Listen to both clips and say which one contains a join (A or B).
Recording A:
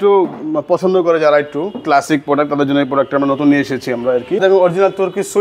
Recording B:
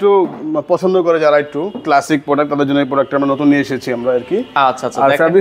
A